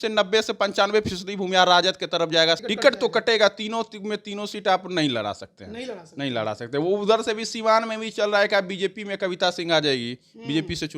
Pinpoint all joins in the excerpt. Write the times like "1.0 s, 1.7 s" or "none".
2.6 s